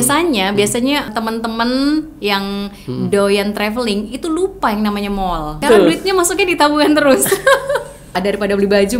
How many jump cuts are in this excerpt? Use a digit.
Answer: 3